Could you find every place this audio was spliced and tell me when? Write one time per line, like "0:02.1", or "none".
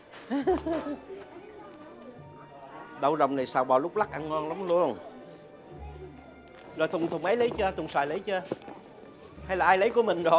0:06.7